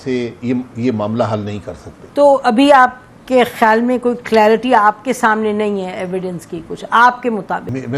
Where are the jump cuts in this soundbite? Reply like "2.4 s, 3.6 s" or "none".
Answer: none